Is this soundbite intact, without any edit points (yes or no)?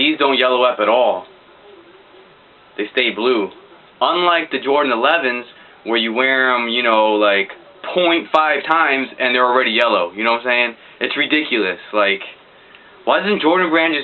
no